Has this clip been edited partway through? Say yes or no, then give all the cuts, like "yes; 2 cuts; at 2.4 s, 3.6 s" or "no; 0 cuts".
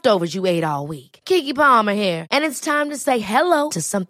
no; 0 cuts